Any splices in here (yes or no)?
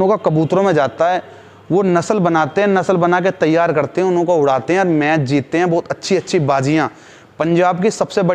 no